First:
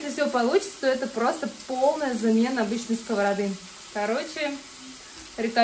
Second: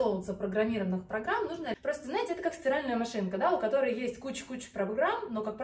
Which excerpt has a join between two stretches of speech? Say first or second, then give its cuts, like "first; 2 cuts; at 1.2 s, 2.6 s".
second; 1 cut; at 1.8 s